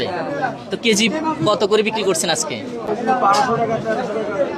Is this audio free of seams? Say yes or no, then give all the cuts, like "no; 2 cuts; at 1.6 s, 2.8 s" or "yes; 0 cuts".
yes; 0 cuts